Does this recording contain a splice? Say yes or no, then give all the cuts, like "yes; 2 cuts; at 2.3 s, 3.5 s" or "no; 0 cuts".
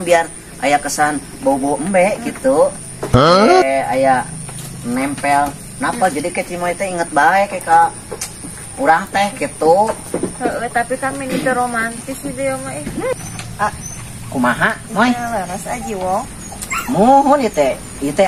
yes; 1 cut; at 13.1 s